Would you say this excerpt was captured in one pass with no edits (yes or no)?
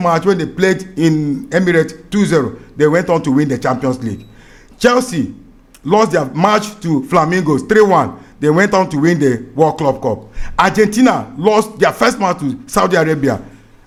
yes